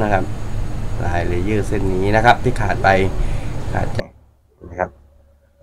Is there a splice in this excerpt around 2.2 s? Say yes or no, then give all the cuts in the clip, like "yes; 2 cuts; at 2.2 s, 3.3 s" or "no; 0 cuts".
no; 1 cut; at 4.0 s